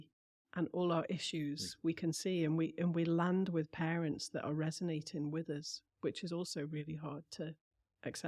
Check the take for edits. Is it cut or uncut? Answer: uncut